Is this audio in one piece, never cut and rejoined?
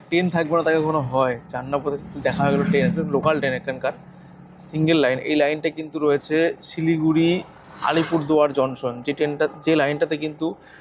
yes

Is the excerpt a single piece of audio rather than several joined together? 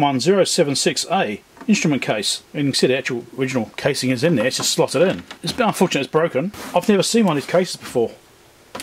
no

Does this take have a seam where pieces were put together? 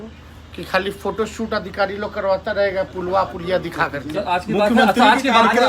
no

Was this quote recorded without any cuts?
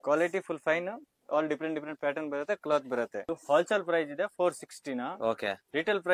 yes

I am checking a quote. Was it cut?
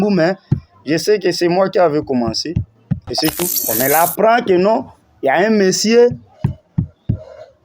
yes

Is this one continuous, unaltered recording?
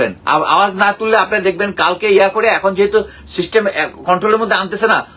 yes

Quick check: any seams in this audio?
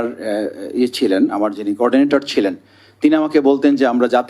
no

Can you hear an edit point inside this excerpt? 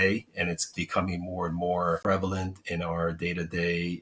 yes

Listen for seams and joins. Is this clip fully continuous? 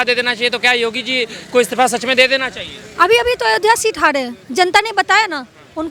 yes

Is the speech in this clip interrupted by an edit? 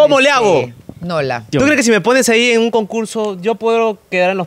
yes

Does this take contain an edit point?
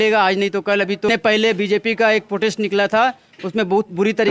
yes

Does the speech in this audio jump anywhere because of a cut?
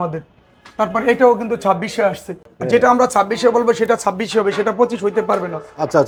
no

